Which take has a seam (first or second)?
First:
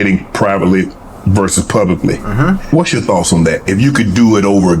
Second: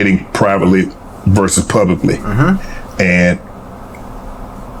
first